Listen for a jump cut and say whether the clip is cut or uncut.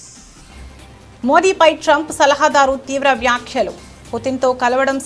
cut